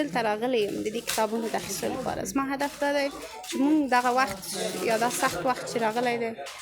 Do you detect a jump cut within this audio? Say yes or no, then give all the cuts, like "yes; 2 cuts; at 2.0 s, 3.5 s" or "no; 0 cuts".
no; 0 cuts